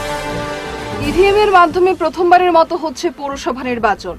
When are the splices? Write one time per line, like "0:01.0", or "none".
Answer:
0:00.9

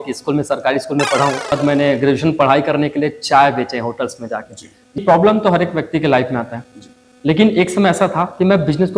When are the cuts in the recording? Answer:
0:01.5
0:05.0

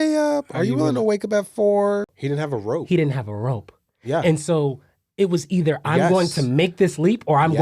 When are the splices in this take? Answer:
0:02.1

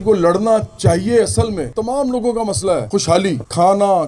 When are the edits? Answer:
0:01.7

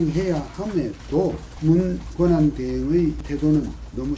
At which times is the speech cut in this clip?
0:01.5
0:03.2

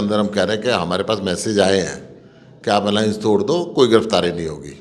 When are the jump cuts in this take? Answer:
none

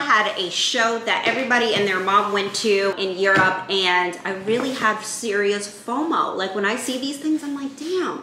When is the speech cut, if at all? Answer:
none

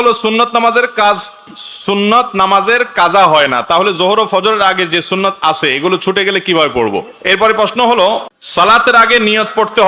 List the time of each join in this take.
0:07.1
0:08.4

